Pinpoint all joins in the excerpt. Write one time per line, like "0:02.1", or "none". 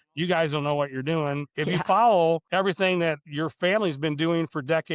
0:01.5
0:02.4
0:03.3